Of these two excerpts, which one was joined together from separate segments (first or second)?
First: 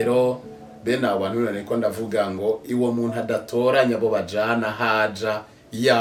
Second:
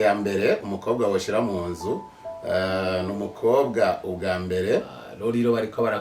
second